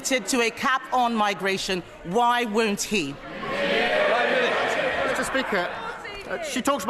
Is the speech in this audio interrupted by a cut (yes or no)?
no